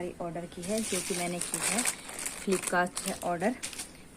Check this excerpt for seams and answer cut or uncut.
uncut